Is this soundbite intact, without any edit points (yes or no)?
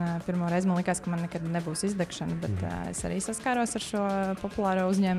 yes